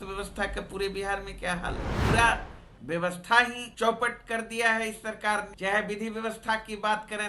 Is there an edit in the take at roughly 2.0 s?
yes; 3 cuts; at 2.0 s, 3.6 s, 5.5 s

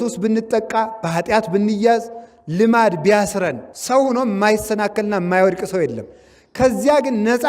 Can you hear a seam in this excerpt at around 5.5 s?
no; 1 cut; at 3.7 s

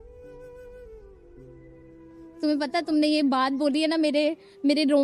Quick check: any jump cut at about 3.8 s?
no; 2 cuts; at 1.0 s, 2.4 s

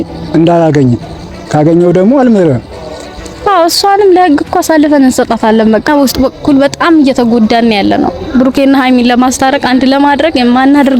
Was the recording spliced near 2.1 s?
no; 1 cut; at 5.9 s

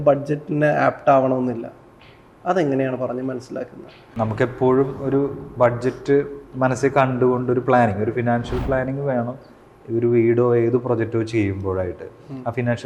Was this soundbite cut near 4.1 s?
yes; 1 cut; at 4.1 s

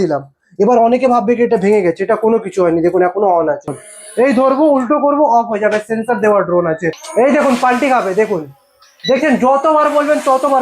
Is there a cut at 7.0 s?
yes; 2 cuts; at 3.8 s, 7.0 s

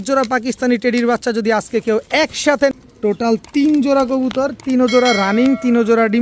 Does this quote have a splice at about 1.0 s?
no; 1 cut; at 2.7 s

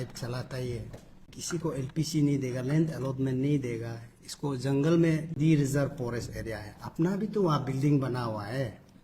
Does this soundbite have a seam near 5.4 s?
yes; 2 cuts; at 1.3 s, 5.4 s

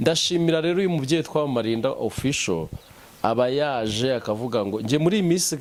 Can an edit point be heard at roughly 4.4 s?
no; 0 cuts

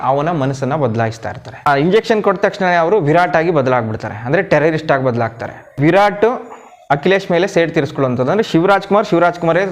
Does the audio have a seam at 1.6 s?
yes; 2 cuts; at 1.6 s, 5.8 s

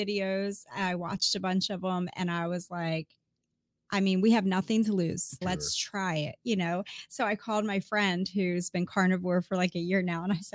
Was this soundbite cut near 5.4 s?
yes; 1 cut; at 5.4 s

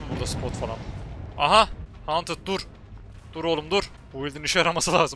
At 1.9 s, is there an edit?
yes; 2 cuts; at 1.9 s, 4.0 s

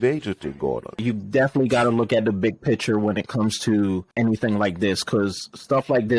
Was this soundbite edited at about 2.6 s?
no; 2 cuts; at 1.0 s, 4.1 s

